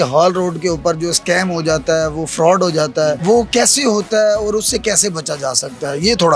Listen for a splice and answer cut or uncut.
uncut